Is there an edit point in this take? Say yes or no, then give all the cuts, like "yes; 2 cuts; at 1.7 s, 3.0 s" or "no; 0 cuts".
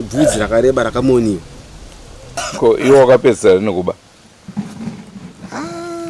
yes; 1 cut; at 2.4 s